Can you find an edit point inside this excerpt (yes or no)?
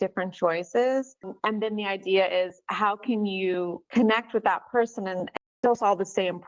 yes